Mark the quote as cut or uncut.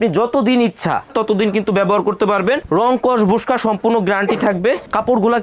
uncut